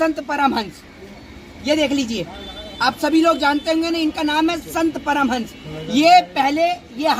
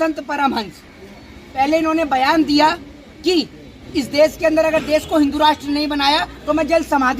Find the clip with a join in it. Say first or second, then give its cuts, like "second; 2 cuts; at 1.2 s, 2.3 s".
second; 1 cut; at 1.4 s